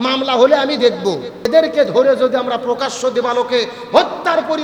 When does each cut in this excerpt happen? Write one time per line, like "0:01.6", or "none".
0:01.5